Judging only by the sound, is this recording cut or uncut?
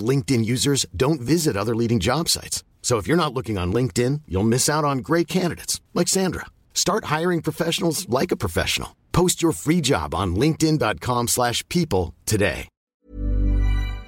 cut